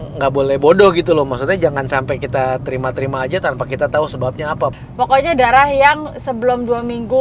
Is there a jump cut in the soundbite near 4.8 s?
yes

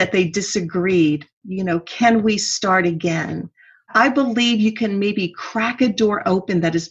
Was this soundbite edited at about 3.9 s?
yes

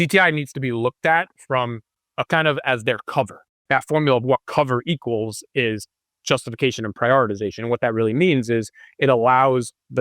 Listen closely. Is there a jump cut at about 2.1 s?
yes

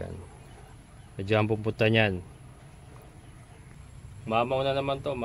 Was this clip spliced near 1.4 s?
no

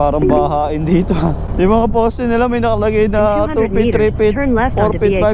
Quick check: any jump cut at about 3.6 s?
no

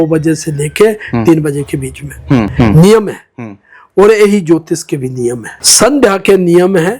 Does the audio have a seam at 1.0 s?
no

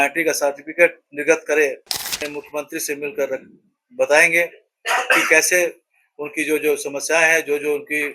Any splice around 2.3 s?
yes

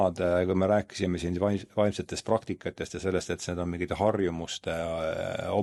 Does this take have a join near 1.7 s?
no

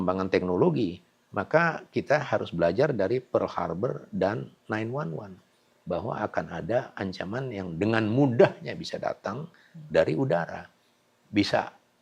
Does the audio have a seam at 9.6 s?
no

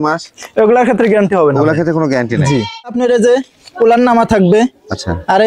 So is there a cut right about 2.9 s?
yes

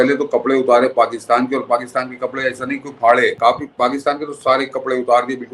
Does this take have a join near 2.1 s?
no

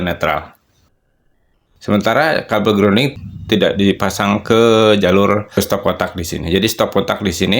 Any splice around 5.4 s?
no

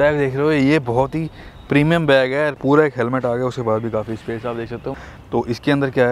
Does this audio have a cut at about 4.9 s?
yes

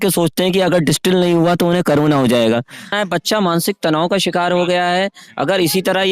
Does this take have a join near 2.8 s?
yes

